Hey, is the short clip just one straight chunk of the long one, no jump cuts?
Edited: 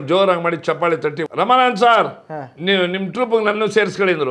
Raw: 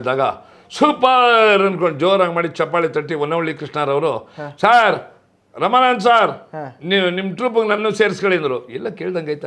no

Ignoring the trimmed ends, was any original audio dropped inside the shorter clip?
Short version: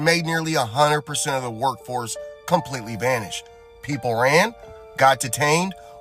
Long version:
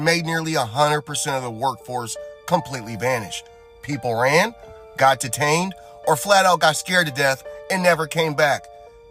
no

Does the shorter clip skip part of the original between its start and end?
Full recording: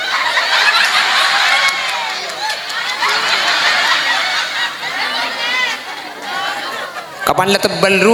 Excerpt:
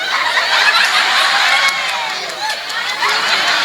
no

